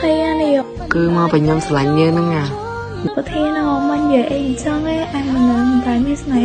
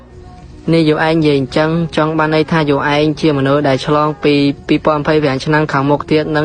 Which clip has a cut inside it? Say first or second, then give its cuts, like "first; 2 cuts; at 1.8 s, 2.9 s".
first; 1 cut; at 3.1 s